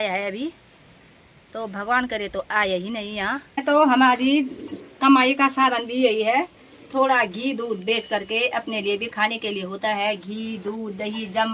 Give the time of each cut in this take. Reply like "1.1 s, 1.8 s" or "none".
3.6 s